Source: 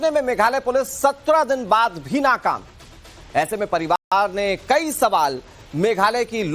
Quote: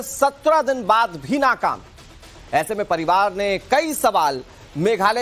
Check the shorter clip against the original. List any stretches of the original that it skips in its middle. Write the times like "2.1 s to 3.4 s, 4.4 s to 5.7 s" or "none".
4.0 s to 4.1 s